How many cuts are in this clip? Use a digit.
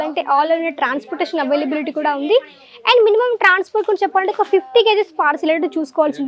0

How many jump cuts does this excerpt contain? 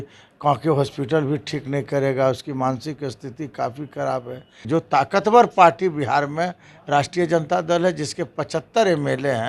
1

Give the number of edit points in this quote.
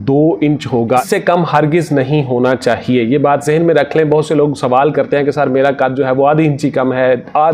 1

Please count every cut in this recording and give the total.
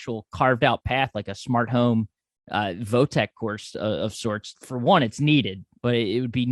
2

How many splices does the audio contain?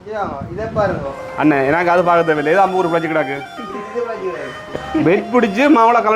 1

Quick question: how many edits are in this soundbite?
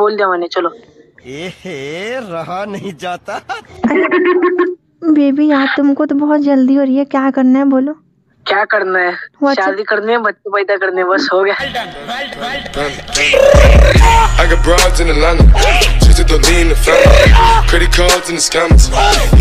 0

